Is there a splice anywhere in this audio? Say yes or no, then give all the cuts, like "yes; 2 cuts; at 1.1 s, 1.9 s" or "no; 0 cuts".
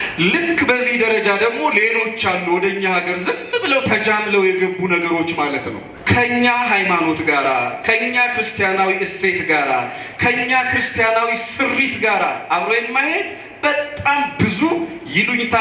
yes; 1 cut; at 5.9 s